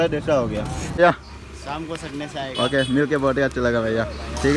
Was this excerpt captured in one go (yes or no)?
yes